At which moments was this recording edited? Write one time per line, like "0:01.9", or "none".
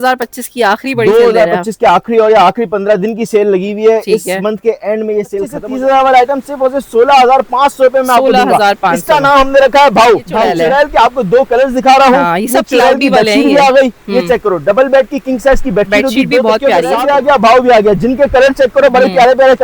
0:05.6
0:10.4
0:17.0